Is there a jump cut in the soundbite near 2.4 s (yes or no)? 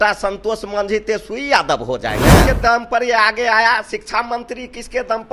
yes